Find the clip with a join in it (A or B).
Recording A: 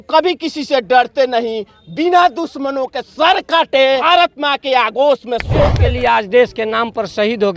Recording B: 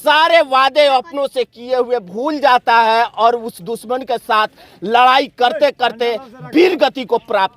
A